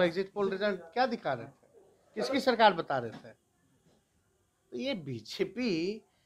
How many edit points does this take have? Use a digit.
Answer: 0